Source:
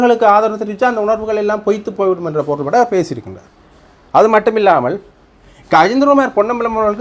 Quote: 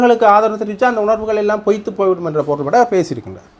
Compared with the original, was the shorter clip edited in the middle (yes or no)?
no